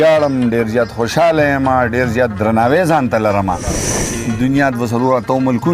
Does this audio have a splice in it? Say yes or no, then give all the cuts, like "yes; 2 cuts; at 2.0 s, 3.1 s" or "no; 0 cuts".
yes; 1 cut; at 3.9 s